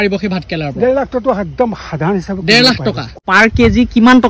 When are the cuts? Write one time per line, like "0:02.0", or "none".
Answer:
0:03.1

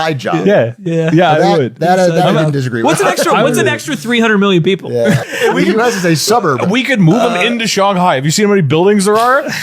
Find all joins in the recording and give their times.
0:05.3

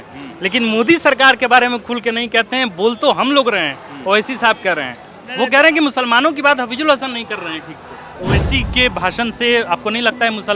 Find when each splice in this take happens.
0:08.1

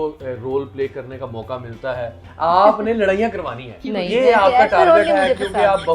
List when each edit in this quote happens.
0:02.2

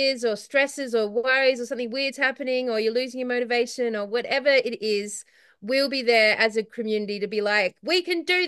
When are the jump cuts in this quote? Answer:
none

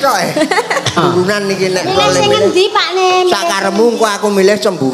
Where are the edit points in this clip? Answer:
0:01.0

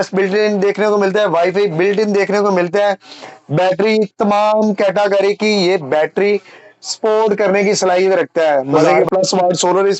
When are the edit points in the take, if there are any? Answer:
0:08.7

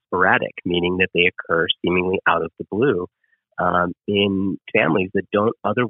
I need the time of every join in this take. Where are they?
none

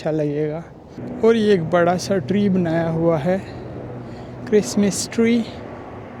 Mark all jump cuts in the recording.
0:01.0

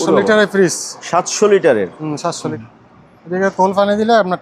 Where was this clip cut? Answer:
0:02.5

